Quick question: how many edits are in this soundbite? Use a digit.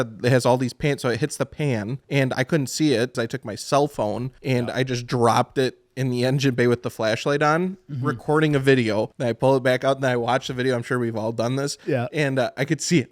4